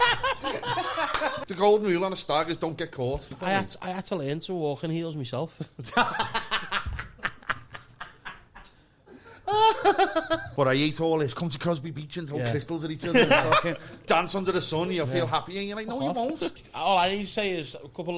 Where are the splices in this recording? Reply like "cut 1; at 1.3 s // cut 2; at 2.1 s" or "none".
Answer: cut 1; at 1.4 s // cut 2; at 3.3 s // cut 3; at 10.5 s // cut 4; at 16.6 s